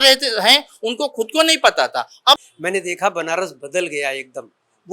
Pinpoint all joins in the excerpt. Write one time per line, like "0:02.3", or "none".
0:02.4